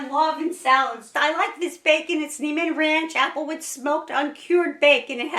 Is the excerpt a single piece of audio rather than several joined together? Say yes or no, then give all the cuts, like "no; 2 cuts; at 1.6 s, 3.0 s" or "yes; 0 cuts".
no; 1 cut; at 1.1 s